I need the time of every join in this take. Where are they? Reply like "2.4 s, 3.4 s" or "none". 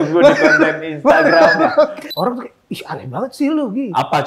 2.0 s

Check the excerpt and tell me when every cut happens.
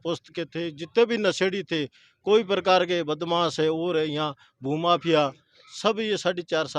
none

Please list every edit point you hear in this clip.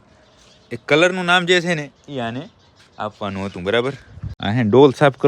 4.3 s

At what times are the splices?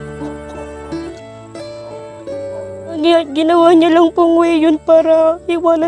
1.1 s, 3.0 s

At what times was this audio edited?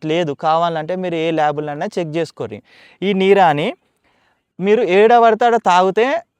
none

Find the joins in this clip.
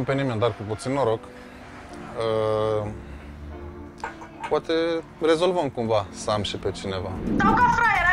7.2 s

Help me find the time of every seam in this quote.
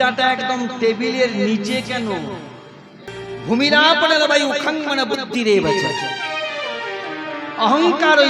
3.1 s

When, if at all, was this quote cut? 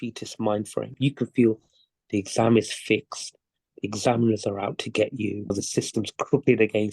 0.9 s, 5.5 s

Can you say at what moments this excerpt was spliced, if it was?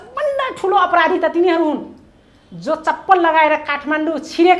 none

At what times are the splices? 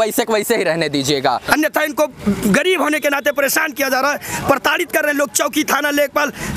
1.5 s

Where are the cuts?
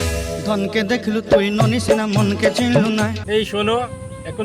3.2 s

